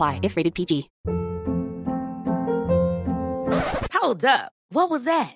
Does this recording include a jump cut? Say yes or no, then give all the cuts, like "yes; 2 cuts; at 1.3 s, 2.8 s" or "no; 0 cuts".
yes; 1 cut; at 0.9 s